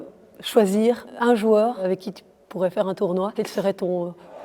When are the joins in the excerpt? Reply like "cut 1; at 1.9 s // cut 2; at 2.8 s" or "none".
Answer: cut 1; at 1.1 s // cut 2; at 1.8 s // cut 3; at 3.3 s